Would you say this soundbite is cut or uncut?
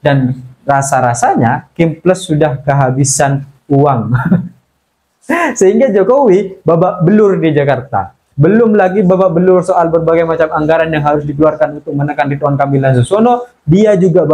uncut